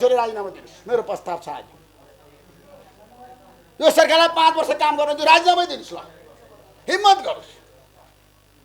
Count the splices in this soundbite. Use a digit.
0